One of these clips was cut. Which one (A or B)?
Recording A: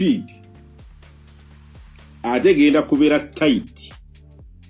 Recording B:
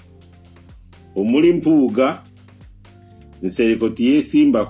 B